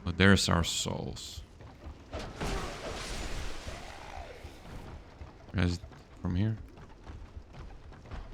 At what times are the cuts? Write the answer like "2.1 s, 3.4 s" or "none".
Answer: 5.5 s